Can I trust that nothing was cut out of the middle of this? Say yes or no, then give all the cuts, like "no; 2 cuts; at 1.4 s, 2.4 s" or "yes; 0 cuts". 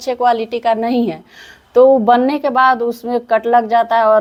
yes; 0 cuts